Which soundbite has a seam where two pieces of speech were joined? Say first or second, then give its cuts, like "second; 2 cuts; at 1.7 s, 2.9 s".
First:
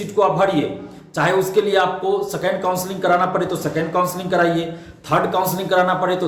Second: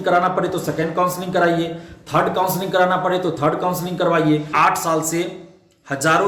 second; 1 cut; at 4.5 s